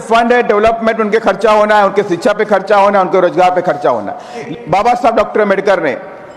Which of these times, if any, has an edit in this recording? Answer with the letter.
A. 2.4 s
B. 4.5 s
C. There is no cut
B